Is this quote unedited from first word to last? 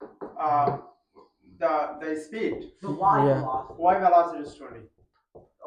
yes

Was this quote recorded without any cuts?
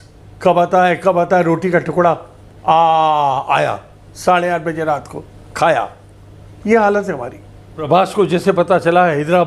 no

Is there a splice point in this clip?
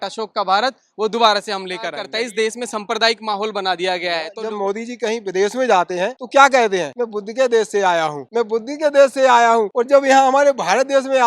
yes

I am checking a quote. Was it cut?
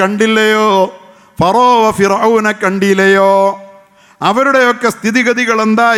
no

